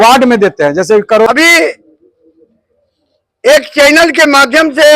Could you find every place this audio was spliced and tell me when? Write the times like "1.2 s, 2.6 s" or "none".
1.3 s